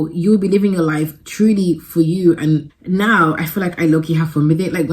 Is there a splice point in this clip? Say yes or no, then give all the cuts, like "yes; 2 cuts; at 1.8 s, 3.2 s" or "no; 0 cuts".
yes; 1 cut; at 2.7 s